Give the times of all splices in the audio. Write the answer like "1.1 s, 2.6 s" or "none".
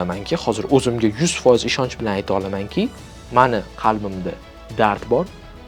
none